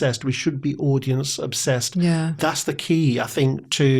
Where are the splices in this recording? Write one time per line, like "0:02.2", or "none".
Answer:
0:02.3